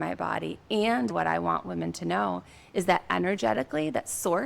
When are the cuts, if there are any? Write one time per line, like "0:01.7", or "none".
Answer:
0:01.1